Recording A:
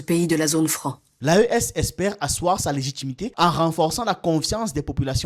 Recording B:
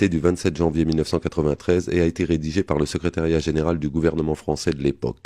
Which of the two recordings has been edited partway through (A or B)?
A